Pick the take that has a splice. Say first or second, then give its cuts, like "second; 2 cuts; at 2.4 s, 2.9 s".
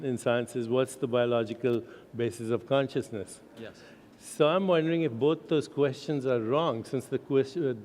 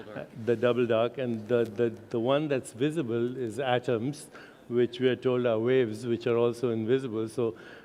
first; 1 cut; at 2.8 s